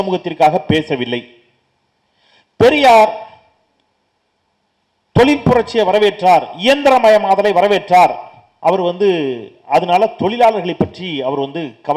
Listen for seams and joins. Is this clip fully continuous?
yes; 0 cuts

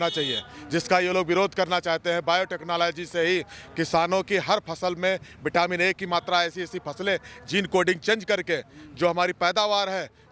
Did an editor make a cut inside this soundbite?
no; 0 cuts

